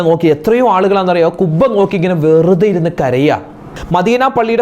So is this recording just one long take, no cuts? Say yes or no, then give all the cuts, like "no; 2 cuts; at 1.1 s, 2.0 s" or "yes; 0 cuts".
no; 1 cut; at 3.6 s